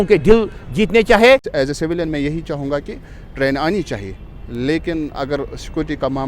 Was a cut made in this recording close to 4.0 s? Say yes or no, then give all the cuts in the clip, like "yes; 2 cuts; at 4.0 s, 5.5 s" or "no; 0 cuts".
no; 1 cut; at 1.5 s